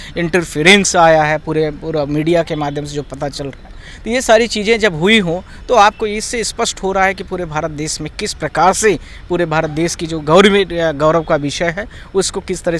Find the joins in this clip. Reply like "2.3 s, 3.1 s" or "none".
none